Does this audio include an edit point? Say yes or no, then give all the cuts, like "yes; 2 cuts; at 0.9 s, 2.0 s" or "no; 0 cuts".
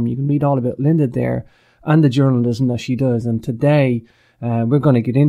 no; 0 cuts